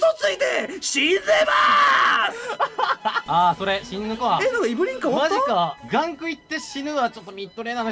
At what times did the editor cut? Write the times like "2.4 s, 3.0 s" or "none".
3.2 s, 5.8 s

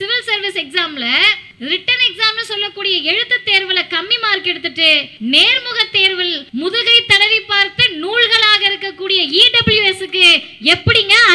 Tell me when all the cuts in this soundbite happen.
1.4 s, 5.1 s, 6.4 s

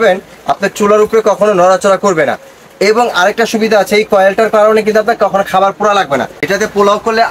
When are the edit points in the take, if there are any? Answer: 6.4 s

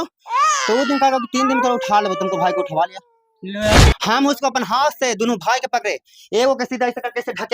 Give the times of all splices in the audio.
3.7 s

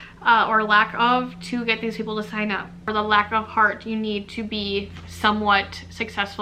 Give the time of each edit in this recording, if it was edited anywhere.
2.9 s

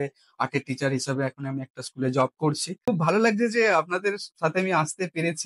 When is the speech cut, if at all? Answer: 2.8 s

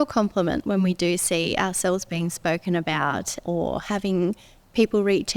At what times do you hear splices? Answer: 3.4 s

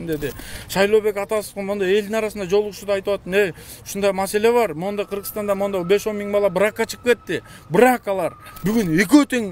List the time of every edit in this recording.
8.5 s

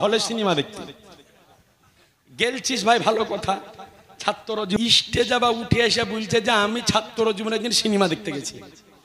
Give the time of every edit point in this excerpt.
4.8 s

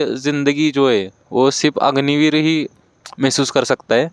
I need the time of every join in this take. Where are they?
none

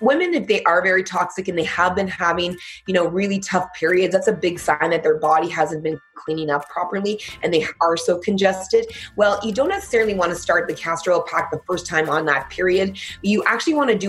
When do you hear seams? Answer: none

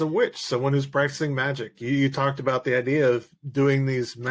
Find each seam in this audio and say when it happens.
none

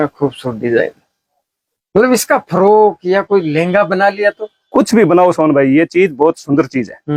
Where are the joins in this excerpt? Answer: none

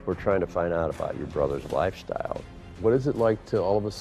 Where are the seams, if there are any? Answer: 1.6 s, 2.7 s

